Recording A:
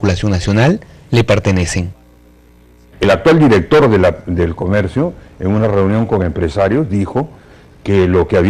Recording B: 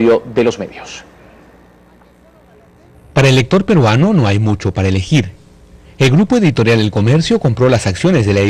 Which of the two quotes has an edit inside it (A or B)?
A